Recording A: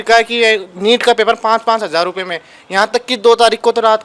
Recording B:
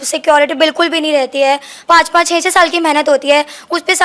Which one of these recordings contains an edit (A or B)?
B